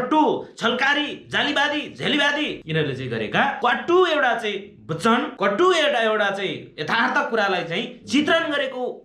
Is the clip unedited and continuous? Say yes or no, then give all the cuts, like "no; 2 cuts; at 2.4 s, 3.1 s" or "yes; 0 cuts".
no; 3 cuts; at 2.6 s, 3.6 s, 5.3 s